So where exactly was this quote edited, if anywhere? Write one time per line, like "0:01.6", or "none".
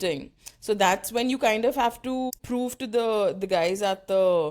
0:02.4